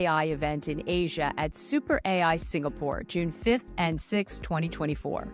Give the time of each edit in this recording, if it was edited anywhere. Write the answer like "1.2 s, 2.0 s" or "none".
none